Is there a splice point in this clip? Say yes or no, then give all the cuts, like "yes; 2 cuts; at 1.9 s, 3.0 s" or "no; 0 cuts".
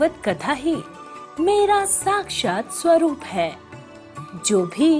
no; 0 cuts